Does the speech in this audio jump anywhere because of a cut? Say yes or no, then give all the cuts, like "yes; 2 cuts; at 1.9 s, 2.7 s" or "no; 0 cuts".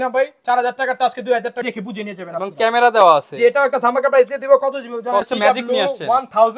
yes; 2 cuts; at 1.6 s, 5.3 s